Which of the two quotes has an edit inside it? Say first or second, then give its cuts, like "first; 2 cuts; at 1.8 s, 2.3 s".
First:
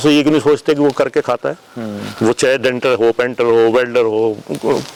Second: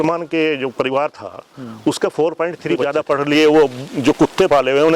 second; 1 cut; at 2.9 s